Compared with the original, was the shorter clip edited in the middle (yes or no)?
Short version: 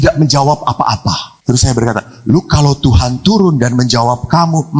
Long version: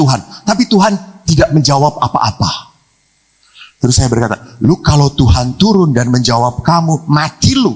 yes